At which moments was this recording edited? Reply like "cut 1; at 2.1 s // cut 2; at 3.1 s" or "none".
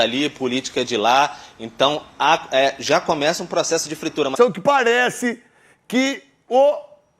cut 1; at 4.3 s